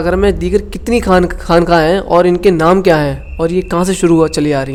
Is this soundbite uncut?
yes; 0 cuts

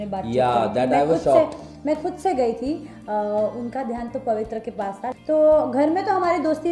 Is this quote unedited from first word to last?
no; 1 cut; at 5.1 s

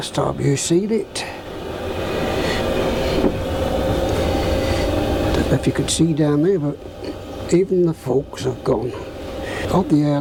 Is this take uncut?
yes; 0 cuts

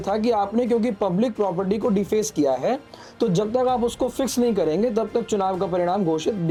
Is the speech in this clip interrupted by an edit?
no; 0 cuts

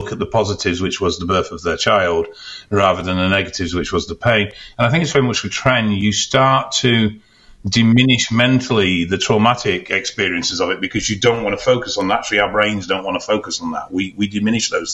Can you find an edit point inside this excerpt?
no; 0 cuts

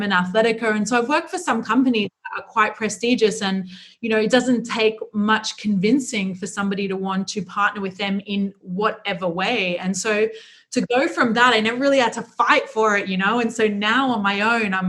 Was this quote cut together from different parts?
no; 0 cuts

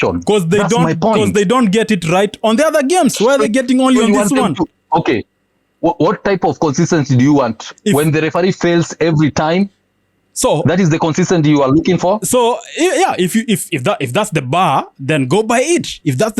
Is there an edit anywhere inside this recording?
no; 0 cuts

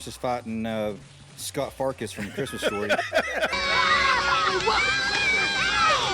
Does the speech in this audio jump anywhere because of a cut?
yes; 1 cut; at 3.5 s

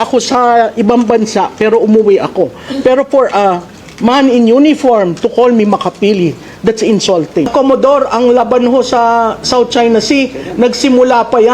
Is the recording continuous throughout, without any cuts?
no; 1 cut; at 7.5 s

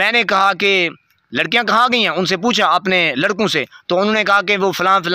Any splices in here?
no; 0 cuts

